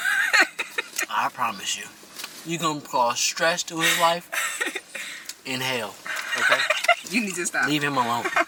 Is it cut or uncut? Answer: uncut